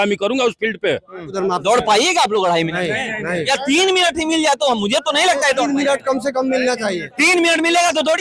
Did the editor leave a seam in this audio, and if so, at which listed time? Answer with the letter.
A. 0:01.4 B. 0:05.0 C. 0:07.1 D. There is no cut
A